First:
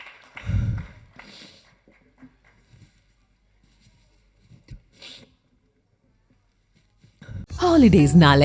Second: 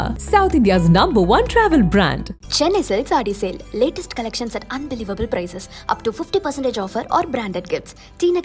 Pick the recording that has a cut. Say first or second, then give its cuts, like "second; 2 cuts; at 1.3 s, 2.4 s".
first; 1 cut; at 7.5 s